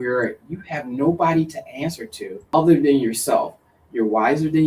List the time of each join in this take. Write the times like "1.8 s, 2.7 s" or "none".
2.4 s